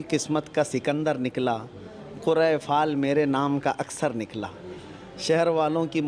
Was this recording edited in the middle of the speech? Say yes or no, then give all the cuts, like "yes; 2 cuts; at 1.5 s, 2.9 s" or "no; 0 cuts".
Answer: no; 0 cuts